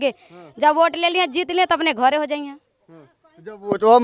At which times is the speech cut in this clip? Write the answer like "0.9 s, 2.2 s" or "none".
none